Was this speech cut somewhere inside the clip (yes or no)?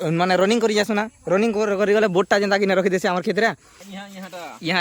yes